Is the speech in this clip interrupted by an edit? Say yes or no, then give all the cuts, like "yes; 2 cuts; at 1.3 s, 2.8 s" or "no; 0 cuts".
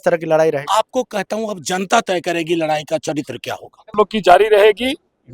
yes; 1 cut; at 3.9 s